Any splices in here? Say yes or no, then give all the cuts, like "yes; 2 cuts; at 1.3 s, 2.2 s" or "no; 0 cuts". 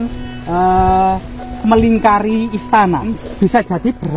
yes; 1 cut; at 3.1 s